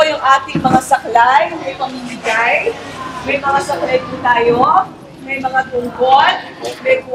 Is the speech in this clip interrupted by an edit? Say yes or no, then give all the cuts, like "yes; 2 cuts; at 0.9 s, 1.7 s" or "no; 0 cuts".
no; 0 cuts